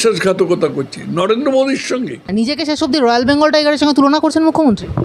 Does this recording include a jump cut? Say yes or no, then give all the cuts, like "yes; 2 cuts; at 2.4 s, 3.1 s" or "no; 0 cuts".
yes; 1 cut; at 2.3 s